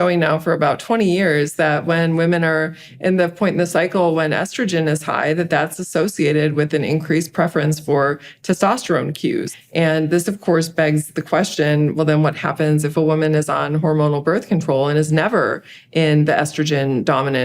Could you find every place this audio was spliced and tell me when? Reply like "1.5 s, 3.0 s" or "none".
9.5 s